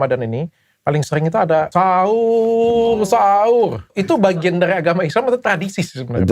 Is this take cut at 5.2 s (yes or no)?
no